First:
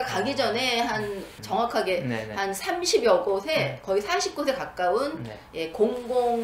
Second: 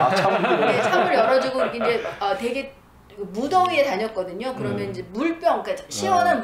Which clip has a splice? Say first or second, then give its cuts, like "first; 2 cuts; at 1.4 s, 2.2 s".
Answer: first; 1 cut; at 1.3 s